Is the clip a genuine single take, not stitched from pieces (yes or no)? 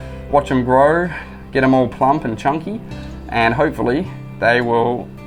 yes